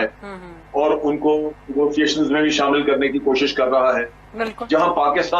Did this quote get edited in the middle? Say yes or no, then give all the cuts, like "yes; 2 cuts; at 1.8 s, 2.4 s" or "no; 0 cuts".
no; 0 cuts